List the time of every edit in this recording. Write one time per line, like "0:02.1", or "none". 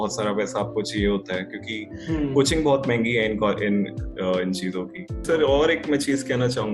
0:05.2